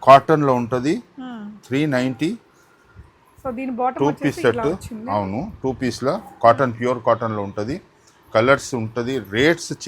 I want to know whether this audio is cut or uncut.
uncut